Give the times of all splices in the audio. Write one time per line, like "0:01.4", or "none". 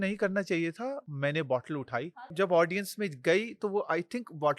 0:01.1
0:02.1

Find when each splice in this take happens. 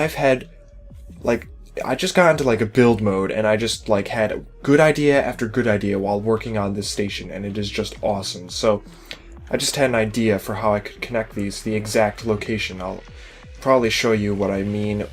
0:04.2

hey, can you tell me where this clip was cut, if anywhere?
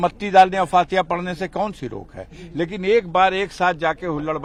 none

